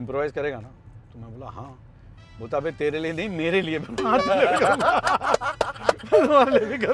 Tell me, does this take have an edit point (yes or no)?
no